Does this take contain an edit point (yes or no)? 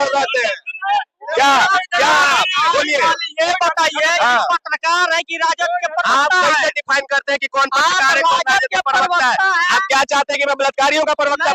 no